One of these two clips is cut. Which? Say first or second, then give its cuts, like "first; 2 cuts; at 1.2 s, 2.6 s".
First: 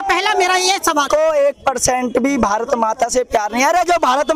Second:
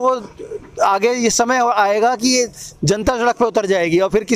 first; 1 cut; at 1.1 s